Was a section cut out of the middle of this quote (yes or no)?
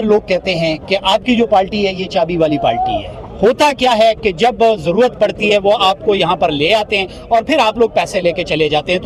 no